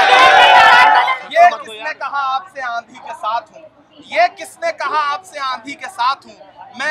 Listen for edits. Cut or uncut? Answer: cut